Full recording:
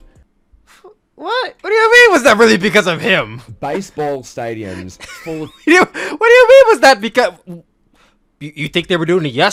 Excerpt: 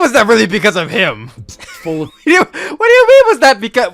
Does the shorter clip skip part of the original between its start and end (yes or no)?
yes